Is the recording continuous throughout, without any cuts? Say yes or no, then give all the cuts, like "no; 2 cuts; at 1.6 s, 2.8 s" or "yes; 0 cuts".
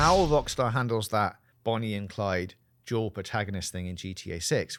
yes; 0 cuts